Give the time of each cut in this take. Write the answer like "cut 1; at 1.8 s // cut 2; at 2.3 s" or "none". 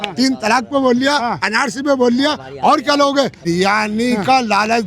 cut 1; at 3.5 s